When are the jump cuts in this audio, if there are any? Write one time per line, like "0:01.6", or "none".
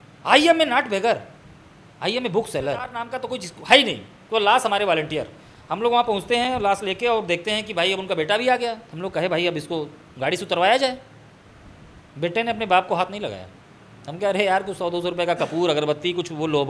0:03.1

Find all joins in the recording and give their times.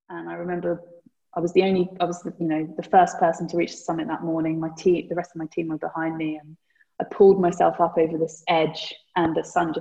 none

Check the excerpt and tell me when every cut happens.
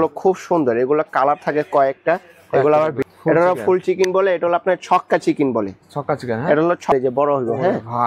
0:03.0
0:06.9

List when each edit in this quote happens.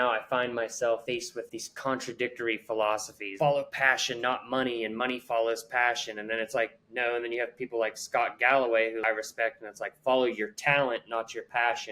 0:01.0
0:03.3
0:09.0

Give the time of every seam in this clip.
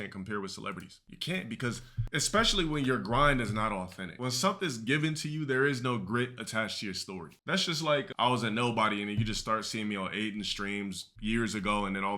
0:01.9
0:04.1

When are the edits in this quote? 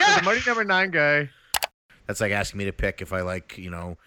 0:01.6

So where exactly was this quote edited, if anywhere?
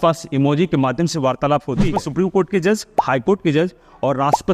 0:02.0

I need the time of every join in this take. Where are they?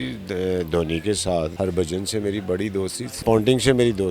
0:01.5
0:03.1

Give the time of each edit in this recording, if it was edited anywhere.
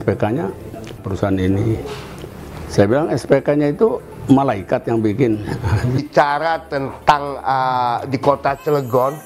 0:01.1
0:06.0

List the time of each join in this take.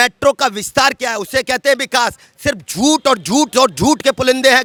none

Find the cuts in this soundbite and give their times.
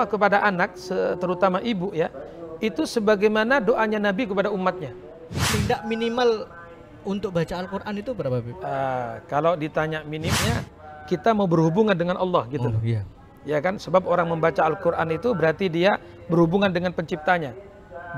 0:05.5
0:10.4

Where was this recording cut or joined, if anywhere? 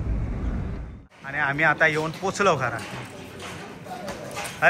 0:00.9

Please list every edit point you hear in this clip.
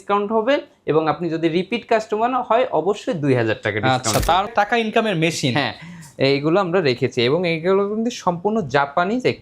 0:04.5

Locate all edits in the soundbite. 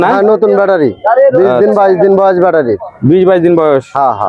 none

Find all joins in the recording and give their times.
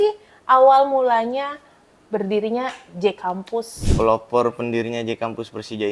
0:03.8

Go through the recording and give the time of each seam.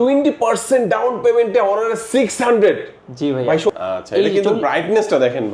0:03.7

